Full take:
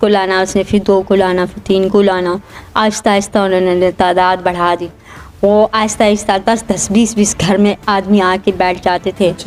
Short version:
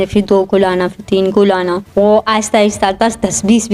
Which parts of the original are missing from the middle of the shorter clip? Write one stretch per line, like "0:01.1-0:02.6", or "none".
0:02.4-0:05.3